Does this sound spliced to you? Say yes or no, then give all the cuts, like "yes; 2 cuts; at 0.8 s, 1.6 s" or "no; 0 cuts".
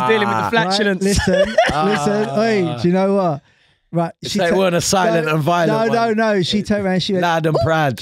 no; 0 cuts